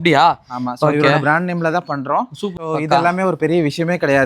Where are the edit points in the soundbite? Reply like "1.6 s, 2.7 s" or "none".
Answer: 2.5 s